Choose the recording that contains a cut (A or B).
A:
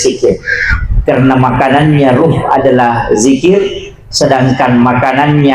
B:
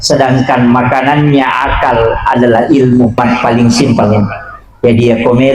B